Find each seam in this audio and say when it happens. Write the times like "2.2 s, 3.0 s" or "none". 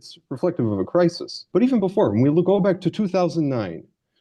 1.3 s